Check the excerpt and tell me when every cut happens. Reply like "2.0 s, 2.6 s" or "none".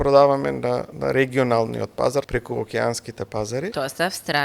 0.9 s, 2.3 s, 3.7 s